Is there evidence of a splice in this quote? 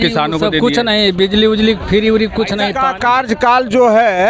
yes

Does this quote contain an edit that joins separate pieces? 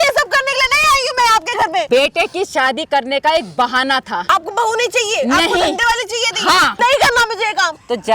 yes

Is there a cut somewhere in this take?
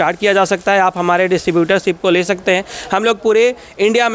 no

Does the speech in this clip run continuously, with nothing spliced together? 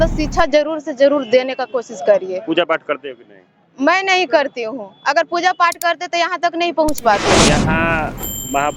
no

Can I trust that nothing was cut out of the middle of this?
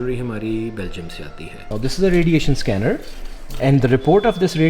no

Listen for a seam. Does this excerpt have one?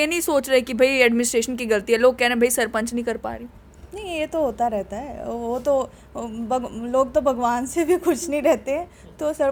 no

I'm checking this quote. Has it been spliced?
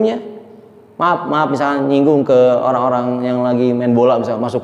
no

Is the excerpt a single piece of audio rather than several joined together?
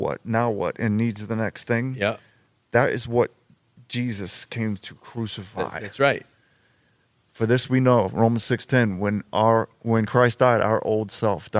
yes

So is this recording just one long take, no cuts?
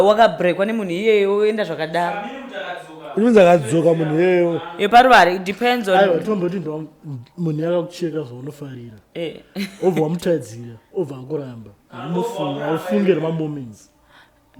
yes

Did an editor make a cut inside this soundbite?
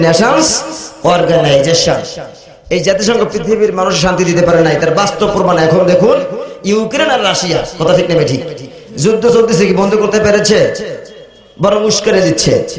no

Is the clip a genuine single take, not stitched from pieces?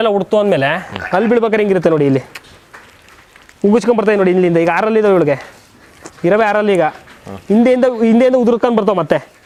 yes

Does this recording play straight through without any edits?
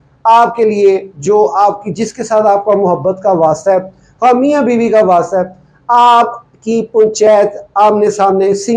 yes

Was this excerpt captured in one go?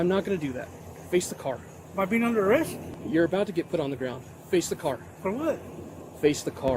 no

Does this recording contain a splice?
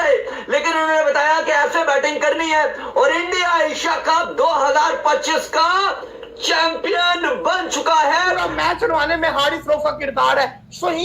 yes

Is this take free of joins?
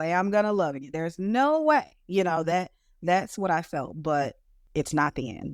no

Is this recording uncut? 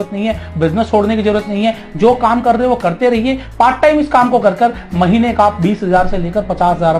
yes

